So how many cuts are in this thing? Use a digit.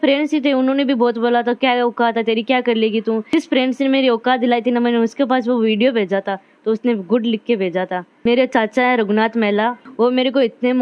0